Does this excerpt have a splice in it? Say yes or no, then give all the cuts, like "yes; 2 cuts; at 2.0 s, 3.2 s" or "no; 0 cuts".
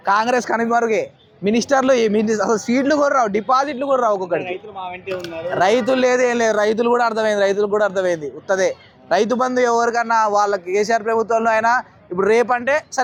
no; 0 cuts